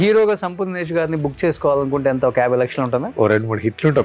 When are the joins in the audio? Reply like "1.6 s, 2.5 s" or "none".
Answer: 3.1 s